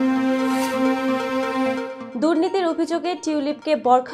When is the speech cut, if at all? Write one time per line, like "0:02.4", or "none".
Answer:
0:02.0